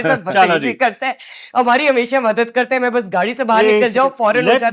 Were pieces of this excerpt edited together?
no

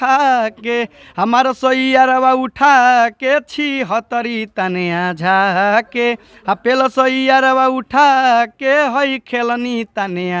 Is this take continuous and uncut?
yes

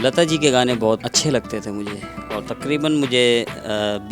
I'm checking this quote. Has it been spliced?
yes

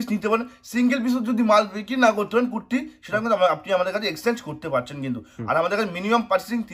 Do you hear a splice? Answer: no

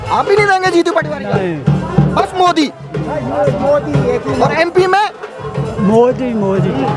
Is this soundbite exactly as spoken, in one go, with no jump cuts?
yes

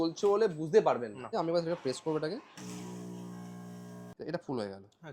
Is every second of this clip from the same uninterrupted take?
no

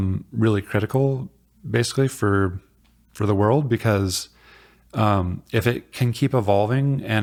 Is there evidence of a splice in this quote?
no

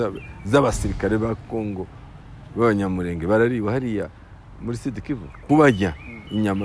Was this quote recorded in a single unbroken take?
no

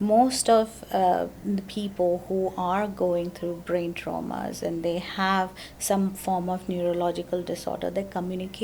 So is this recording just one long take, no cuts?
yes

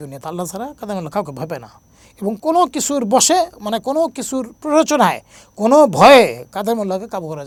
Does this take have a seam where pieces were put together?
no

